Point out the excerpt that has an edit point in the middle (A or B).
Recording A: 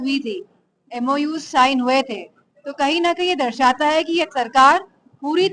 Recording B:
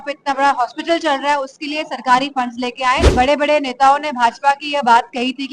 B